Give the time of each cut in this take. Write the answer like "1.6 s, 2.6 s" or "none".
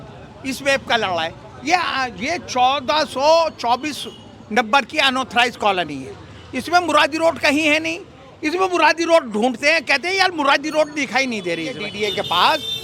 11.9 s